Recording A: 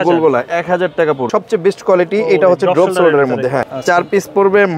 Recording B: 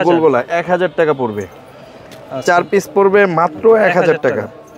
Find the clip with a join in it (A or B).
A